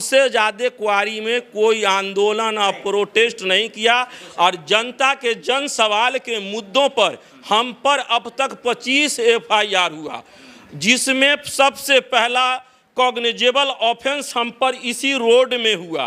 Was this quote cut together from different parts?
no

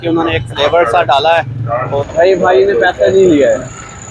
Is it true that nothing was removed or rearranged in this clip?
no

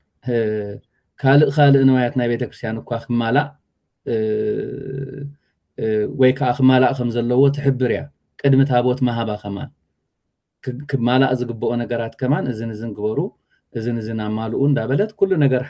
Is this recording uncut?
yes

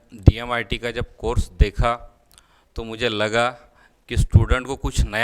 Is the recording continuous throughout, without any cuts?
yes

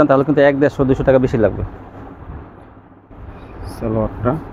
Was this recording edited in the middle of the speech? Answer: no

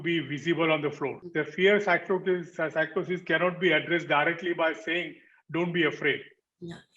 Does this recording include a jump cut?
yes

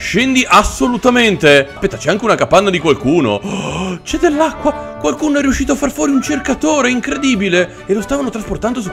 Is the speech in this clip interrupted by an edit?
yes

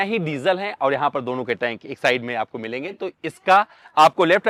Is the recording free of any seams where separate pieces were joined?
yes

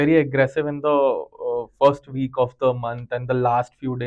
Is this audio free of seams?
yes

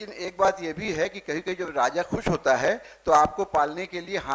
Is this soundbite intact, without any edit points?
yes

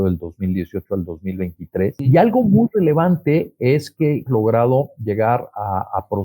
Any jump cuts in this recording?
yes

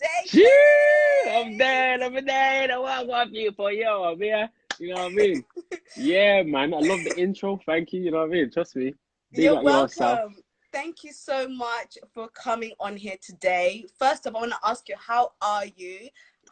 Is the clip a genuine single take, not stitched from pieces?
yes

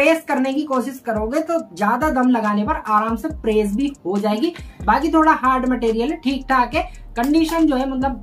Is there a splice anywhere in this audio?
no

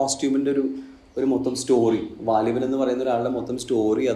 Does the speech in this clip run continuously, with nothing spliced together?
yes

